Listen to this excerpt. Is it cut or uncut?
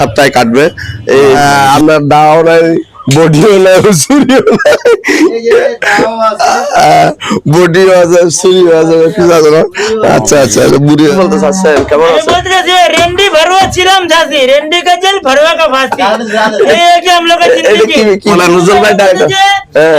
cut